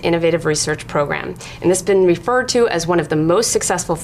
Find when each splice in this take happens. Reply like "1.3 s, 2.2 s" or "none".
1.8 s